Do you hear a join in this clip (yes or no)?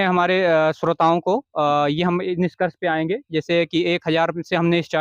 no